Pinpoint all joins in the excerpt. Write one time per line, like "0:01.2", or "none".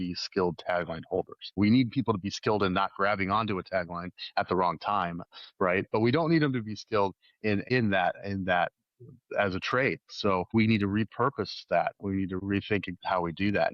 0:01.6
0:07.7
0:10.5
0:12.4